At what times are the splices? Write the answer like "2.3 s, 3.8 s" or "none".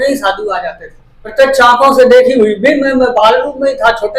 1.3 s